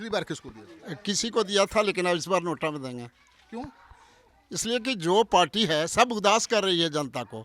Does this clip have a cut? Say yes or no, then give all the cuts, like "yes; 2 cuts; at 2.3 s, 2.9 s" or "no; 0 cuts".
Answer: no; 0 cuts